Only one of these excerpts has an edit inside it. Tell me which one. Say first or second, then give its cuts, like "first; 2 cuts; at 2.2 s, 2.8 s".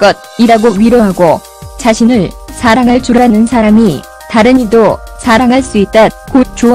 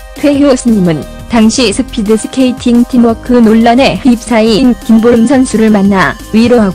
second; 1 cut; at 1.0 s